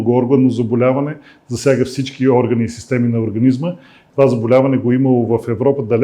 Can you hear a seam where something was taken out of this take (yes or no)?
yes